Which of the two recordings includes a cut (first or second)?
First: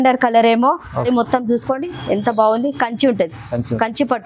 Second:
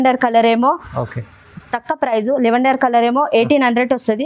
first